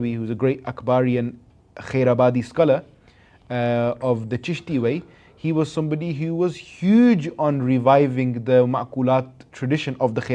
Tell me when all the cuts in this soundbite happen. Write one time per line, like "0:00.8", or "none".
none